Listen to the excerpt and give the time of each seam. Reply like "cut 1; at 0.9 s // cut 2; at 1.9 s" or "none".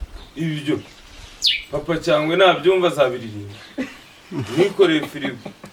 none